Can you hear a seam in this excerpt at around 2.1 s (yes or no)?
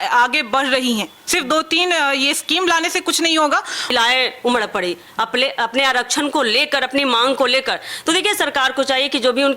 no